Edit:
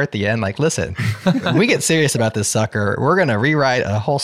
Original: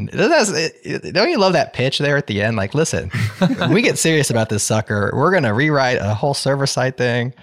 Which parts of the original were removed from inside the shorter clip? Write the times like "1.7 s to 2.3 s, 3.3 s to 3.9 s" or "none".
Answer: none